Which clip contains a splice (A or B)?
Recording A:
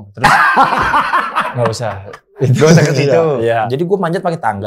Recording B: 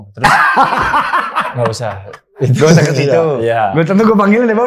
A